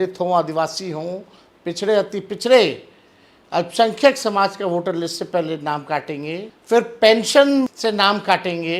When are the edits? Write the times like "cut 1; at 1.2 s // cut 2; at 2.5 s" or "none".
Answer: cut 1; at 6.5 s // cut 2; at 7.7 s